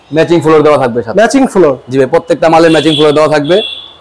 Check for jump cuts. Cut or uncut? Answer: uncut